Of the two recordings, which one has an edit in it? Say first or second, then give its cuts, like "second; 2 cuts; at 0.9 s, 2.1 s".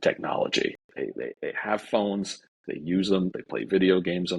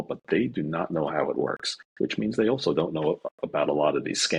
first; 2 cuts; at 0.8 s, 3.4 s